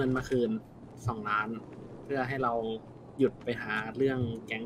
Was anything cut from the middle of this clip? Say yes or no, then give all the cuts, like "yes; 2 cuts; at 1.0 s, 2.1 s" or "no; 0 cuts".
no; 0 cuts